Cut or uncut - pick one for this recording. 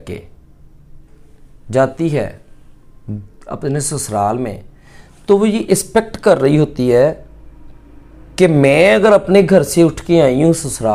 uncut